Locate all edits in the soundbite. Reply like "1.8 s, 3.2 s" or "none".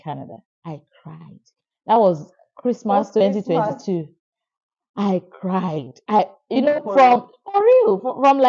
none